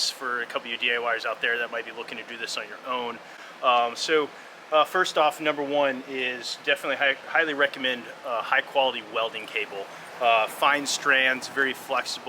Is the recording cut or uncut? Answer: uncut